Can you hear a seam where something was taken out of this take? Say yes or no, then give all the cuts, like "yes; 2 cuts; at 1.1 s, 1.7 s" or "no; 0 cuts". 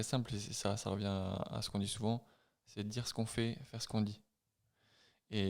no; 0 cuts